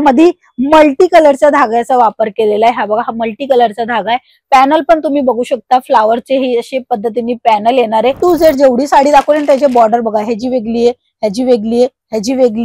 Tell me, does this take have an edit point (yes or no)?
yes